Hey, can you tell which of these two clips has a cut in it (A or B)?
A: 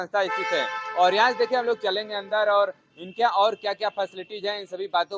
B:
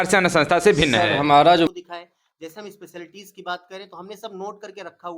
B